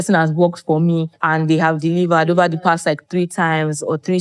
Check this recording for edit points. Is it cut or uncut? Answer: cut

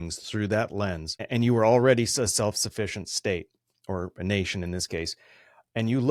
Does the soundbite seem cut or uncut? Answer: uncut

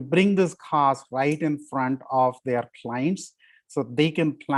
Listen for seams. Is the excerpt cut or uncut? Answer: uncut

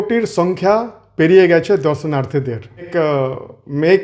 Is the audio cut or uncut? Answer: cut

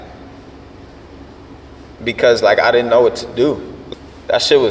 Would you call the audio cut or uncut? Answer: cut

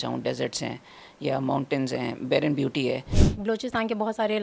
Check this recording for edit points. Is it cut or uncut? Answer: cut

